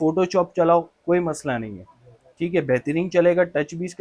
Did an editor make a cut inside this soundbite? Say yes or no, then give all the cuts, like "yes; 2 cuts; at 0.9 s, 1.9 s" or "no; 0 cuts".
no; 0 cuts